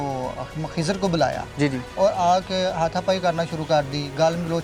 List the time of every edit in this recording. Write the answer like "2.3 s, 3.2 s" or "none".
none